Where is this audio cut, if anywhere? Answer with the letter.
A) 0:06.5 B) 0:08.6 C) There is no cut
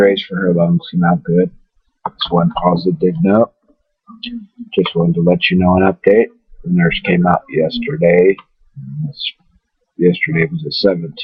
A